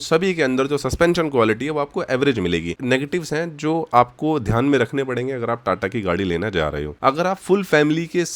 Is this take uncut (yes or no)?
no